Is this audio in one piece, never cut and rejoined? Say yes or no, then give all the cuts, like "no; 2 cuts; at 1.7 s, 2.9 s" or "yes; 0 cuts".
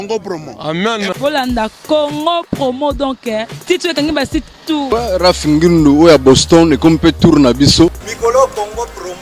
no; 2 cuts; at 4.9 s, 8.1 s